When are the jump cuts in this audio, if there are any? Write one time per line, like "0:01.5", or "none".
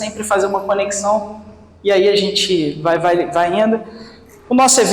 none